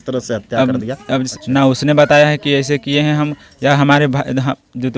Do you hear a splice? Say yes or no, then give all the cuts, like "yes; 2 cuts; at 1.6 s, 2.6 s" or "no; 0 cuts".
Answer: yes; 1 cut; at 1.3 s